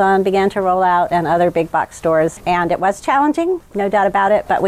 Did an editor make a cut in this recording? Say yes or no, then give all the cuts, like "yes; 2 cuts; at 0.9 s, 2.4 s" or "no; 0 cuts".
yes; 2 cuts; at 2.4 s, 3.7 s